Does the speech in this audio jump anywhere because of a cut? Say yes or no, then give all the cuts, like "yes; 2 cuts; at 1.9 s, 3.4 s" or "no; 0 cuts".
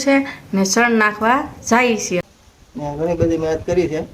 yes; 1 cut; at 2.2 s